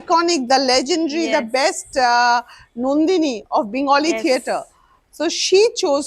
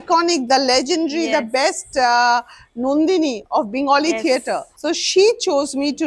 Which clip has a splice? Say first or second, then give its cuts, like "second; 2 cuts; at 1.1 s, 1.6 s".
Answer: second; 1 cut; at 4.7 s